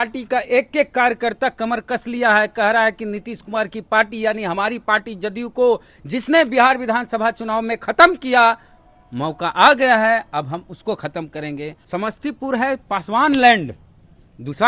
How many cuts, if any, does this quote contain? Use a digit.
1